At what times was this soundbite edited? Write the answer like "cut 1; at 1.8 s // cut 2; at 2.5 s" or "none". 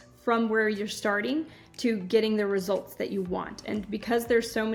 none